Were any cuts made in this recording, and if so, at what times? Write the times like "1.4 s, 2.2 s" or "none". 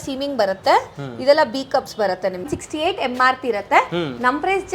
2.5 s